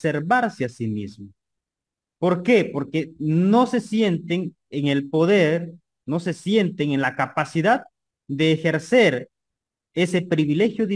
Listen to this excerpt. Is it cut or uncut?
uncut